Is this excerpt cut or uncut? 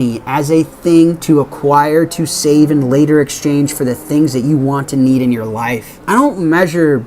cut